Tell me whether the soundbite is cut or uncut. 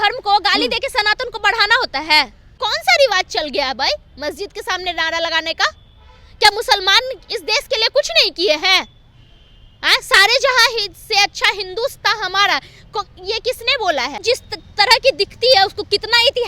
cut